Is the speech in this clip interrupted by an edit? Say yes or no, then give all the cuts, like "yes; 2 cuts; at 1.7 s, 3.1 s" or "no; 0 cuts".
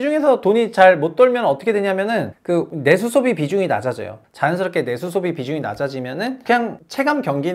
yes; 2 cuts; at 4.2 s, 6.4 s